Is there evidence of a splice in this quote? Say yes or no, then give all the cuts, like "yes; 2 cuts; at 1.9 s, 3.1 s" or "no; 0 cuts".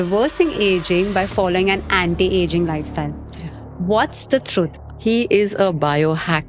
yes; 1 cut; at 4.8 s